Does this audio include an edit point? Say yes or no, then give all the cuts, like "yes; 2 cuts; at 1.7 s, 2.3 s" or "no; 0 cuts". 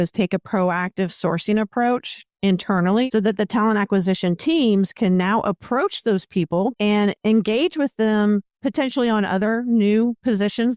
yes; 2 cuts; at 3.1 s, 6.7 s